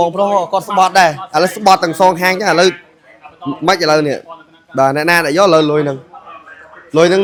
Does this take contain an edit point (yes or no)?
no